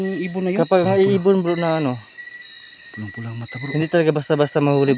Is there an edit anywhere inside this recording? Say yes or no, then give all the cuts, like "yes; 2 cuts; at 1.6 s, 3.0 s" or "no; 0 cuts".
no; 0 cuts